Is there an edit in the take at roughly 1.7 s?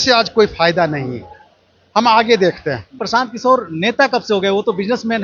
no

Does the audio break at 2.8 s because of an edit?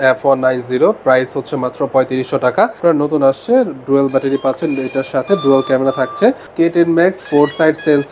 yes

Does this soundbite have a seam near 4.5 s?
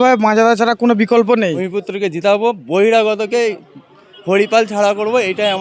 no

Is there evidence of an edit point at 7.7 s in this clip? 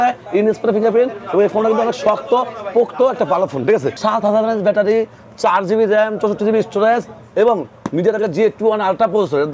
no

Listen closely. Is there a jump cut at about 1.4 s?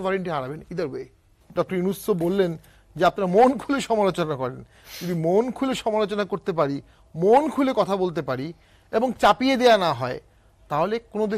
yes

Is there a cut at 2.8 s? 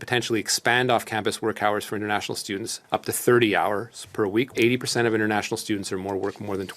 no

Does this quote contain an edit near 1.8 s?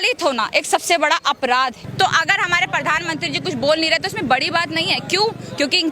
yes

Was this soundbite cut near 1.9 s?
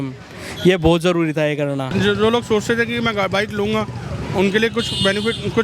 yes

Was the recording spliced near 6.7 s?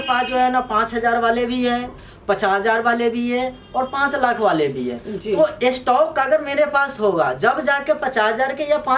no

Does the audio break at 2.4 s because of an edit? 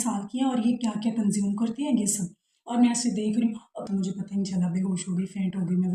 no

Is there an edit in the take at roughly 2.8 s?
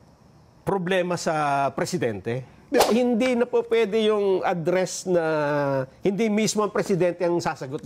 yes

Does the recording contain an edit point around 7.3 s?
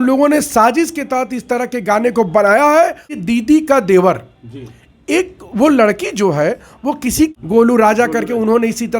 yes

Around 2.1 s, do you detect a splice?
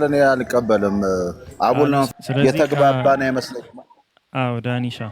yes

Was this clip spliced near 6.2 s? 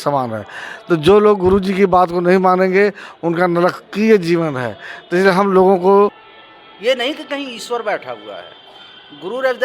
yes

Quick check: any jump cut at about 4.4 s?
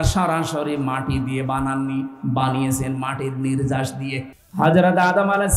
yes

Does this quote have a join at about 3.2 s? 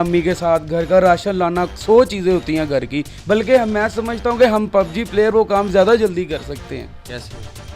no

